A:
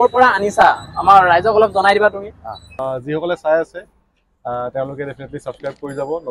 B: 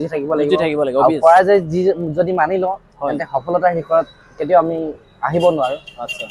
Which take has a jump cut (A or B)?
A